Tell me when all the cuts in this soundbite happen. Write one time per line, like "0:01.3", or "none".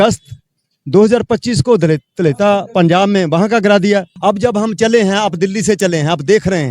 0:04.1